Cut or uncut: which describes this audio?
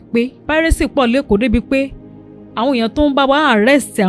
uncut